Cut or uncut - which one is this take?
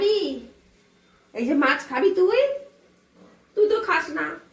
uncut